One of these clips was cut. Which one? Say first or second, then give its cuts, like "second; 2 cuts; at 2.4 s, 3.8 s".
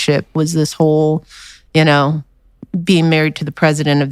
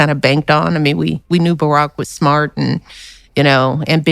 second; 1 cut; at 1.6 s